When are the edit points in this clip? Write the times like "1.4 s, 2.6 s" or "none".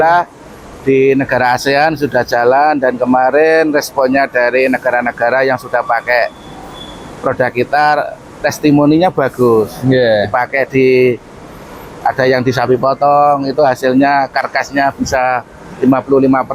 none